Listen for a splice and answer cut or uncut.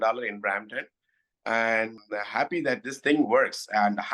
cut